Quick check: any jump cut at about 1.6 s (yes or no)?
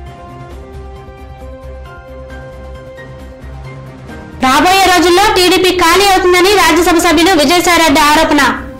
no